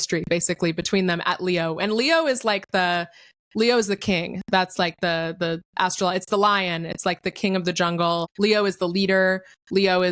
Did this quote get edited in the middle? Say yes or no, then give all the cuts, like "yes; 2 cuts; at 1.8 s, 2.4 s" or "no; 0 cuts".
no; 0 cuts